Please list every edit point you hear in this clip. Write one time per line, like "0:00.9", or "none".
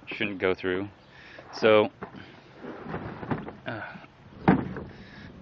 none